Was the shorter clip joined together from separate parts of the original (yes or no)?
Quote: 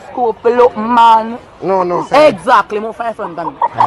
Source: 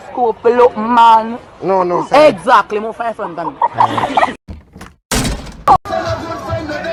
no